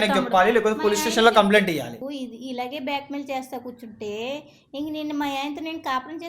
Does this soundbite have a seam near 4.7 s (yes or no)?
no